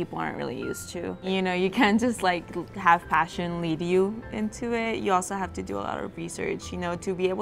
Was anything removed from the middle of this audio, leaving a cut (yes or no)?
yes